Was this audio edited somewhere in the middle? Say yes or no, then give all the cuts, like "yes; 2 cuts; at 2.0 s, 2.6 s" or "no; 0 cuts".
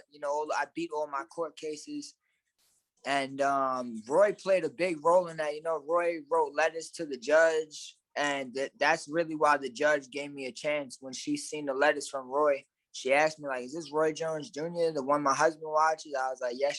no; 0 cuts